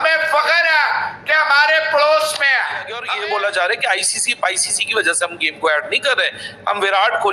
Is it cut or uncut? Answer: cut